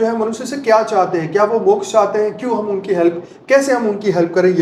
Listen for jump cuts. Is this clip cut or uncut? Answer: uncut